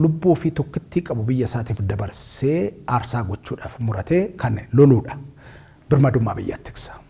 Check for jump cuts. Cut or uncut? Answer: uncut